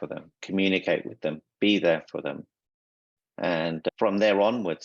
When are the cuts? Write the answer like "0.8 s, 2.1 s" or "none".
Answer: none